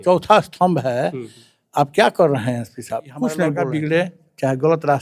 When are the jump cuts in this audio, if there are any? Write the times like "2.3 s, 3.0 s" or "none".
3.5 s